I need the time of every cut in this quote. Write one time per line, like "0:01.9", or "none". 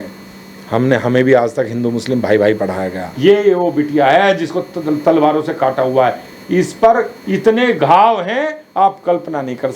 0:03.0